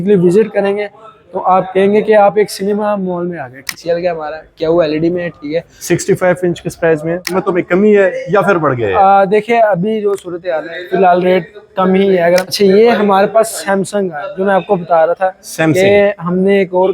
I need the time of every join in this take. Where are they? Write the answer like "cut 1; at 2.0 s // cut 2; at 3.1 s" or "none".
cut 1; at 3.7 s // cut 2; at 7.2 s // cut 3; at 12.5 s